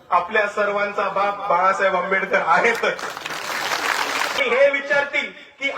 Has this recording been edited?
yes; 1 cut; at 4.4 s

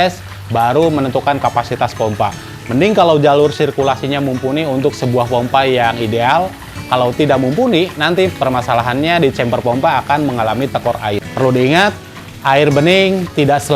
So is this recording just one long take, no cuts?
no; 1 cut; at 11.3 s

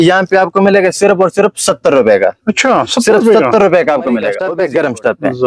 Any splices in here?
yes; 1 cut; at 4.3 s

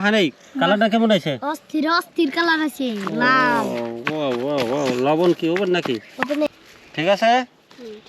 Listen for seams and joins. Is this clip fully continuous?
no; 1 cut; at 6.5 s

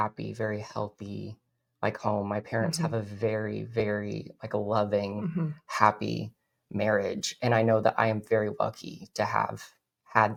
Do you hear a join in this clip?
no; 0 cuts

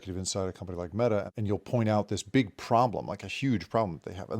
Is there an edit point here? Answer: yes; 1 cut; at 1.3 s

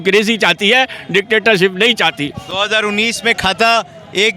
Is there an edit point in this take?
no; 0 cuts

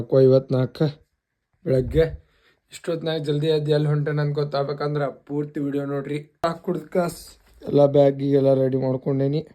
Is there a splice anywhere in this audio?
yes; 1 cut; at 6.4 s

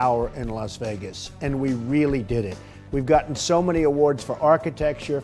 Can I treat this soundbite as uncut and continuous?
yes; 0 cuts

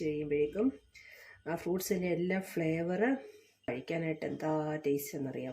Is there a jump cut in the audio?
yes; 1 cut; at 3.7 s

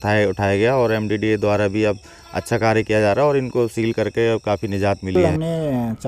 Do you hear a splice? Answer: yes; 1 cut; at 5.2 s

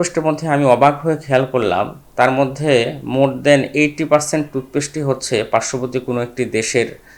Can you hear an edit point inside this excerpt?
no; 0 cuts

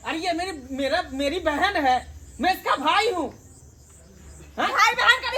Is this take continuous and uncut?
yes; 0 cuts

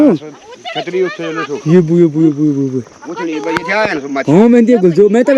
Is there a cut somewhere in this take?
no; 0 cuts

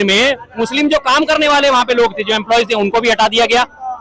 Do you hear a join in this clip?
no; 0 cuts

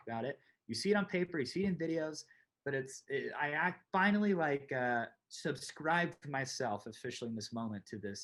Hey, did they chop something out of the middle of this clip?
no; 0 cuts

